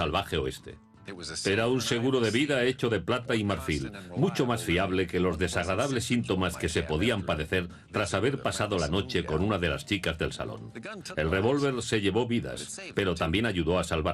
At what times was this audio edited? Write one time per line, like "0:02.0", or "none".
0:07.2

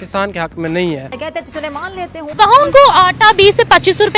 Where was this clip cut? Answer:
0:01.7

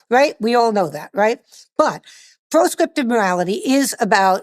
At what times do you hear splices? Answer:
0:01.5

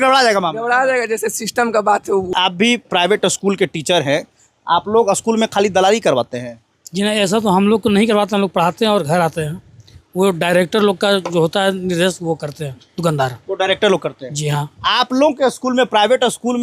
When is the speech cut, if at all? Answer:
0:02.3

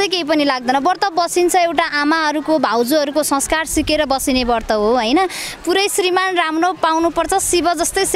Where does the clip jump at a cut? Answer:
none

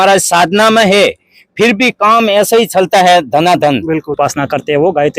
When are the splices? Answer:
0:04.2

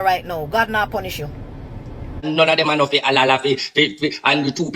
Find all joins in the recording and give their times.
0:02.3

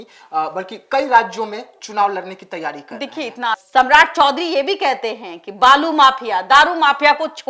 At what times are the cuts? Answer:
0:03.6

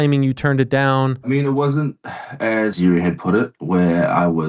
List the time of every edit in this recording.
0:01.3
0:02.8

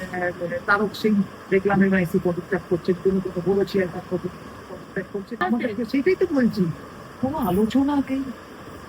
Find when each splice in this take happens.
0:05.4

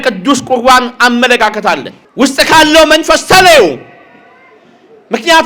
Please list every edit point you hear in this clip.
0:02.1

